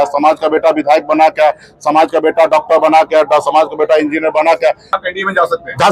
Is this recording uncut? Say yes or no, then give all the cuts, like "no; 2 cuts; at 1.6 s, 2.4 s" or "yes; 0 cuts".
no; 1 cut; at 4.9 s